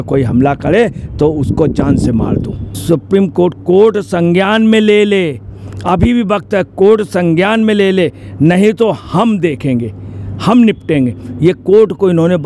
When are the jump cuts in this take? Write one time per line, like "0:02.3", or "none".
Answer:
0:02.7